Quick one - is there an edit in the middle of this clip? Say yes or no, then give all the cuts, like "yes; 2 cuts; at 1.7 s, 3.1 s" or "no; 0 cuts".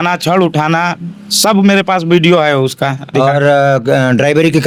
no; 0 cuts